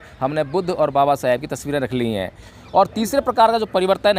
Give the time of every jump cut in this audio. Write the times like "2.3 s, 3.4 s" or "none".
2.5 s